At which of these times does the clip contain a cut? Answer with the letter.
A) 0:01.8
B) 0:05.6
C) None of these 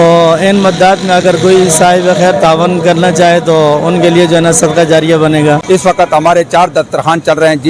B